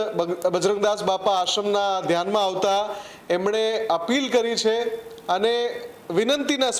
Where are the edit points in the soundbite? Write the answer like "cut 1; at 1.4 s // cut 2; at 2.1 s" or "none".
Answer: none